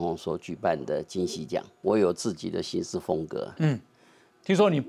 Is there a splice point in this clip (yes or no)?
yes